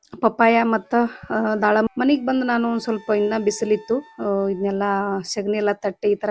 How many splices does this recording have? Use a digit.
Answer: 1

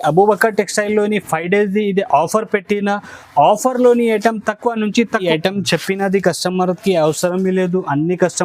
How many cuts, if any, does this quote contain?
1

